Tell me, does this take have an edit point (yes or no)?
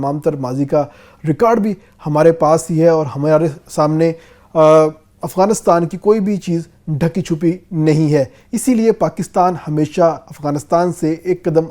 no